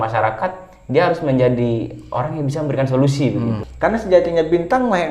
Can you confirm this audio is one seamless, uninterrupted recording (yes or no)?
no